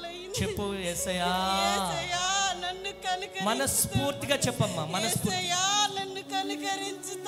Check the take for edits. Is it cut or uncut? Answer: uncut